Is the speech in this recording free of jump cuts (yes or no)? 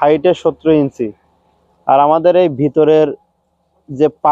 yes